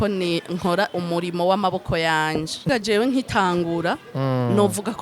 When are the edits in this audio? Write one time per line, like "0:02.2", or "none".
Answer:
0:02.7